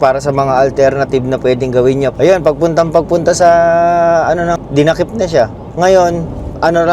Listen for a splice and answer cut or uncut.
cut